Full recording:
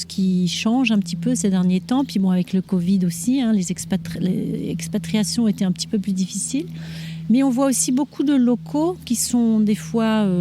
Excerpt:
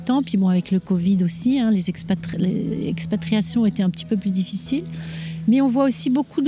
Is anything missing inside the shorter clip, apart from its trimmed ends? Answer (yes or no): no